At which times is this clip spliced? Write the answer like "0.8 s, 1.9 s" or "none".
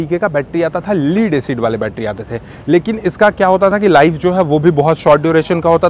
none